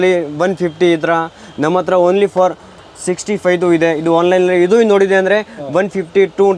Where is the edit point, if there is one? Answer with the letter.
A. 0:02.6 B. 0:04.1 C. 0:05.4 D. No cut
D